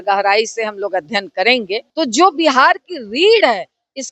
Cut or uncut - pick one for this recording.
cut